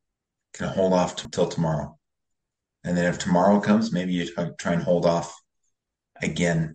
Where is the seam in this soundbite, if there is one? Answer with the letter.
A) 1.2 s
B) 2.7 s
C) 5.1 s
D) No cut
A